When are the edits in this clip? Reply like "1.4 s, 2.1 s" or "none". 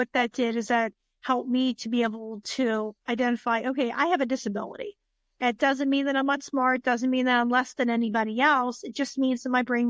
none